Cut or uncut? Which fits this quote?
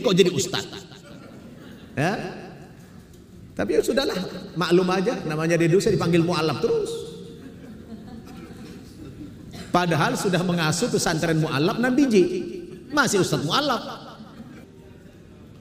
cut